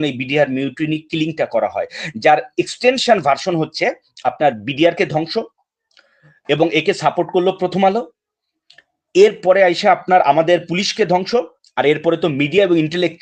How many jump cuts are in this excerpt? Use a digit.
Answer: 0